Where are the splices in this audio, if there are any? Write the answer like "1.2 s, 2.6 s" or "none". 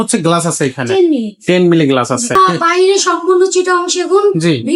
2.4 s

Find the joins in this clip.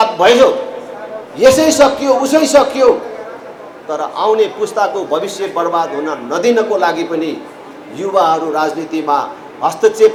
none

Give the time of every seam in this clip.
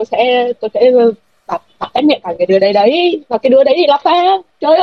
none

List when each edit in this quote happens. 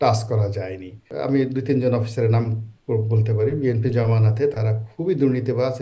1.1 s

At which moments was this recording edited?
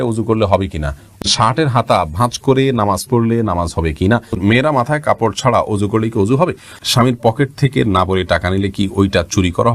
1.2 s, 4.4 s, 6.8 s

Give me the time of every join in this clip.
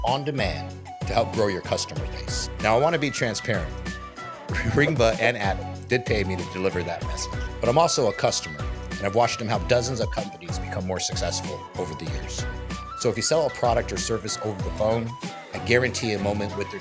none

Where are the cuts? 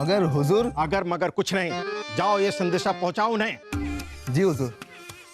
none

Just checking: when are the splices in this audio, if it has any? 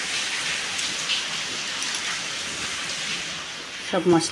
3.3 s

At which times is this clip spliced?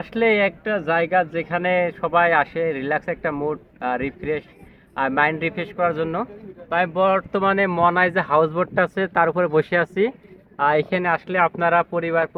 none

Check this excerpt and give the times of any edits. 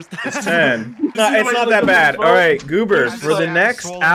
1.1 s

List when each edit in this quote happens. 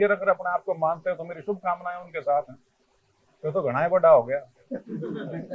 none

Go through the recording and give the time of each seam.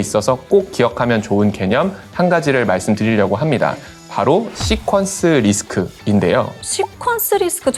none

